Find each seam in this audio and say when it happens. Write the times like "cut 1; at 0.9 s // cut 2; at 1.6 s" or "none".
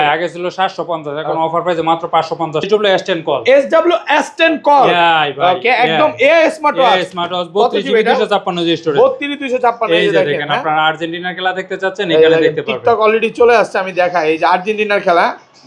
cut 1; at 2.7 s